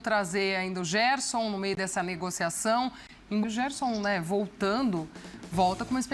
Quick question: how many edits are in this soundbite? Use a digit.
1